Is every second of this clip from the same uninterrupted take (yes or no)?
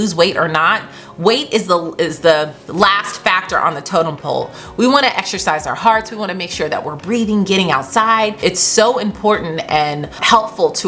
no